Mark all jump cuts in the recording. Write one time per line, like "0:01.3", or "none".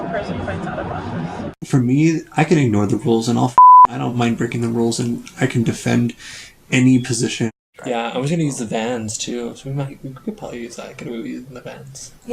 0:01.5
0:07.5